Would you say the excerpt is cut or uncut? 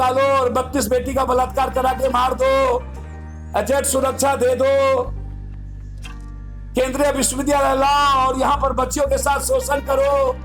uncut